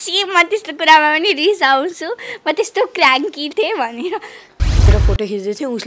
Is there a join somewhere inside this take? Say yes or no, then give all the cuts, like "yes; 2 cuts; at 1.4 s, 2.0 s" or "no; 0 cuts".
yes; 1 cut; at 4.9 s